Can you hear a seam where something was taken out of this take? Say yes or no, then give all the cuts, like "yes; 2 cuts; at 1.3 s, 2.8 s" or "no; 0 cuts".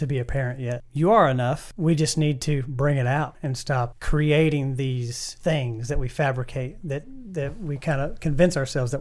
yes; 1 cut; at 1.7 s